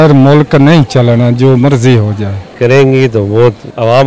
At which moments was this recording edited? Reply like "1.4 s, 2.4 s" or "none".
2.5 s

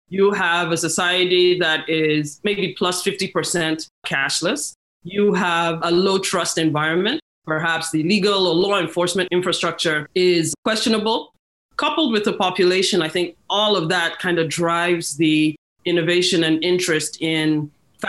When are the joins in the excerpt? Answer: 7.3 s, 9.6 s, 11.4 s

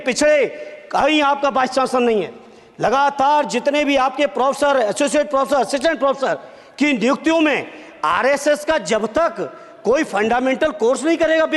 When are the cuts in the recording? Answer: none

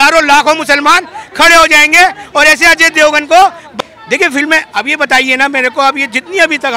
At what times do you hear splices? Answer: 3.6 s

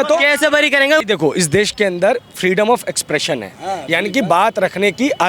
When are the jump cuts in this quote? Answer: 1.0 s

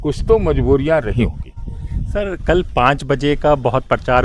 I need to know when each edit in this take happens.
none

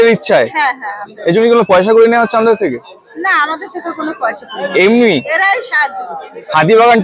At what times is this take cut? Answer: none

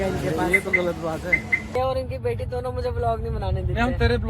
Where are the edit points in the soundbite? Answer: 1.8 s

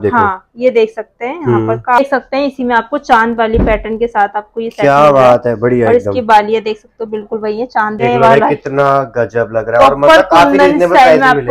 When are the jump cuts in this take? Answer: 2.0 s, 8.0 s

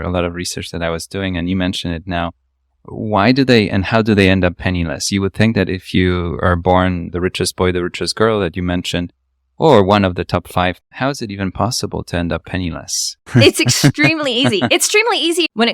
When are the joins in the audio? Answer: 7.1 s, 10.9 s

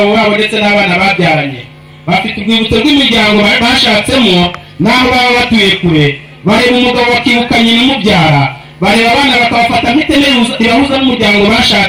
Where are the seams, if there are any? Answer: none

